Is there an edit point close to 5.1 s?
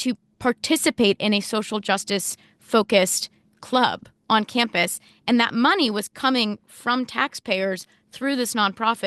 no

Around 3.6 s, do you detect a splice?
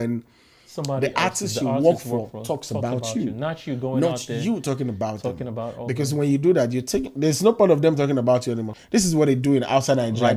no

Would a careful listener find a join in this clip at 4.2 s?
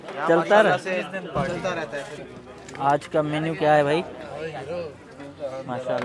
no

